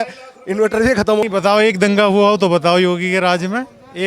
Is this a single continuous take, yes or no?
no